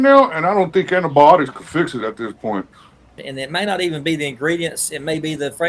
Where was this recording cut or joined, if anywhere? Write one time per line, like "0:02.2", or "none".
0:03.2